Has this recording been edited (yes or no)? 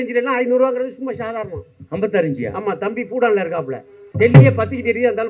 yes